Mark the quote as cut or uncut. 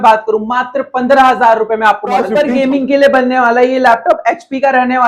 cut